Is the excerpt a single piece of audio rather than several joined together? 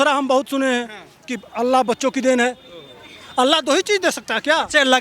yes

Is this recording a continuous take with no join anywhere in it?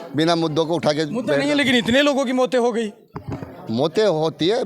yes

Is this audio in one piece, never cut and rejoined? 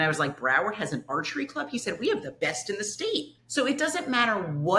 yes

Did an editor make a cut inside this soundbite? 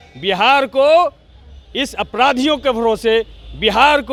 no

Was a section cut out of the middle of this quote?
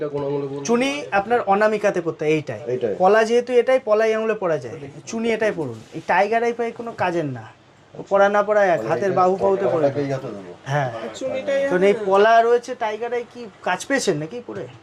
no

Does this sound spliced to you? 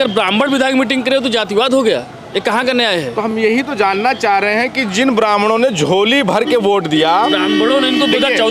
no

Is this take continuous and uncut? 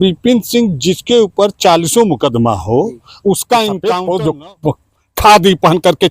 no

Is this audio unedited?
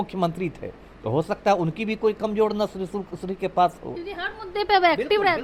yes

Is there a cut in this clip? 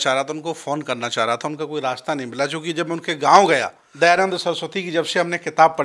yes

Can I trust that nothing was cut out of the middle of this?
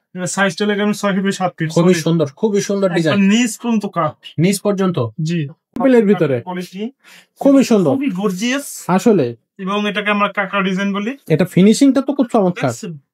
no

